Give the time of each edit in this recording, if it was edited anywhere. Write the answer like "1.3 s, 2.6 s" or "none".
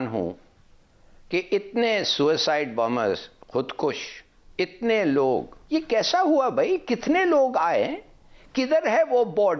none